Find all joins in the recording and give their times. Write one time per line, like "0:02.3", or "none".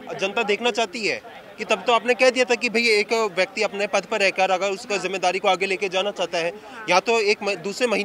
none